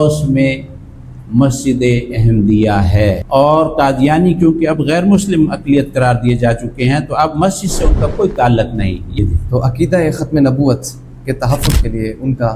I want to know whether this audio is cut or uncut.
cut